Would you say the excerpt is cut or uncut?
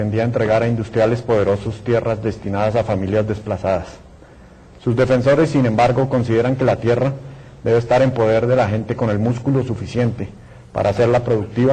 uncut